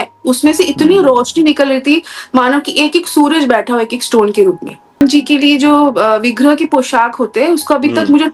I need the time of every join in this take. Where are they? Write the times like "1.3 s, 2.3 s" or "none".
4.9 s